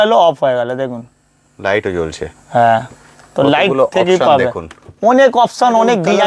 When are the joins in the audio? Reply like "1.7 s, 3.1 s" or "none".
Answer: none